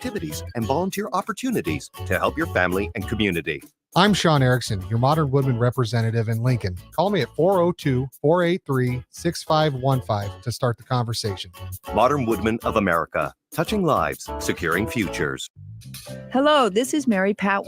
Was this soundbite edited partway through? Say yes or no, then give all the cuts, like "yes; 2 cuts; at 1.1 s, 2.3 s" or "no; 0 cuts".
yes; 1 cut; at 15.4 s